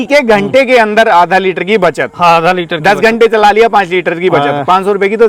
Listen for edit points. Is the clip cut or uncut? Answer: uncut